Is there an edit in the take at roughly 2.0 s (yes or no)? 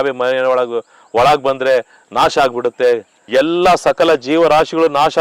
no